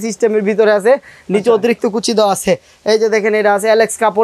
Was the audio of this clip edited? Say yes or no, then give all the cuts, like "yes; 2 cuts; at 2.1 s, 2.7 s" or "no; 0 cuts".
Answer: no; 0 cuts